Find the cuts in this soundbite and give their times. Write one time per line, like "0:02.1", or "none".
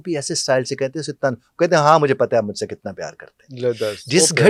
none